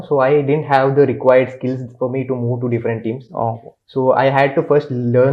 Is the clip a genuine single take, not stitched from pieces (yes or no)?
yes